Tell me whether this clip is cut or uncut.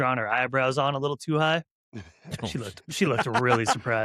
uncut